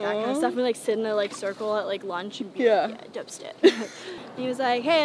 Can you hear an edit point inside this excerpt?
yes; 1 cut; at 4.1 s

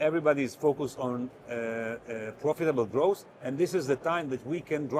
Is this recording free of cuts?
yes; 0 cuts

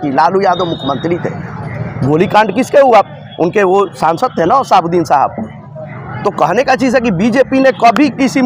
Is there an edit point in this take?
no; 0 cuts

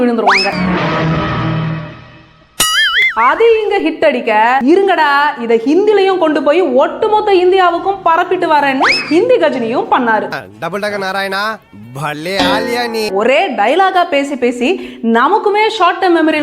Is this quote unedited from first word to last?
no; 2 cuts; at 3.0 s, 13.1 s

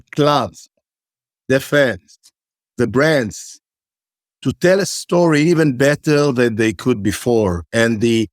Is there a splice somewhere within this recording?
yes; 1 cut; at 2.6 s

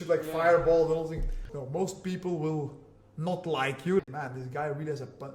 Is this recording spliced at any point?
yes; 2 cuts; at 1.4 s, 4.0 s

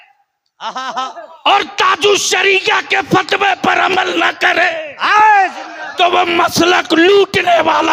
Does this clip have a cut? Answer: no; 0 cuts

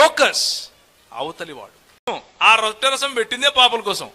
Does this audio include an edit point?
yes; 1 cut; at 2.1 s

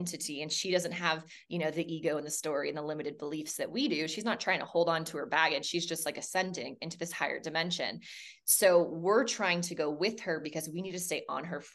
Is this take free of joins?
yes; 0 cuts

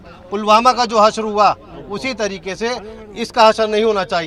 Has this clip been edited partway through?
no; 0 cuts

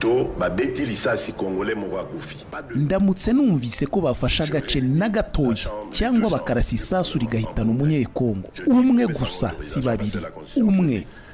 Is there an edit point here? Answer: yes; 1 cut; at 2.5 s

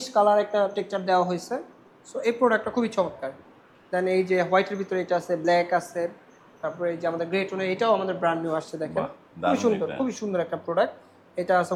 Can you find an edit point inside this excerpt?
no; 0 cuts

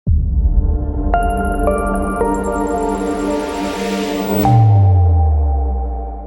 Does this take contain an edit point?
no; 0 cuts

